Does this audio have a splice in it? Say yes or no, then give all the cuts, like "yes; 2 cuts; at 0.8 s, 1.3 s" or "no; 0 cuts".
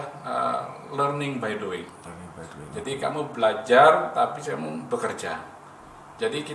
no; 0 cuts